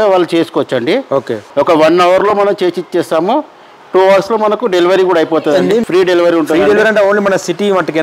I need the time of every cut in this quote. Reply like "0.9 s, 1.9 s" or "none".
1.4 s, 5.8 s